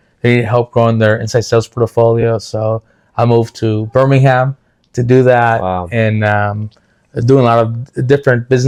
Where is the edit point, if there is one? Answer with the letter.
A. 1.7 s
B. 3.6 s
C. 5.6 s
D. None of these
D